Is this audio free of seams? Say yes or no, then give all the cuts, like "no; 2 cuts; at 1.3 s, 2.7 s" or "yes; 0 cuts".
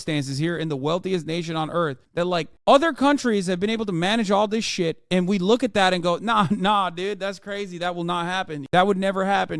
no; 1 cut; at 8.6 s